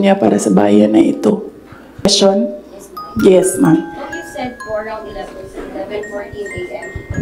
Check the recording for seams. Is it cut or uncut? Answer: cut